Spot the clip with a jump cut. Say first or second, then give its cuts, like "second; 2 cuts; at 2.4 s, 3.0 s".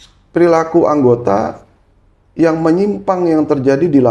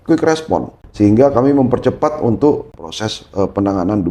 second; 1 cut; at 2.7 s